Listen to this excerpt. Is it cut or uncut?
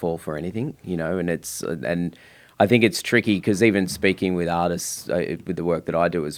uncut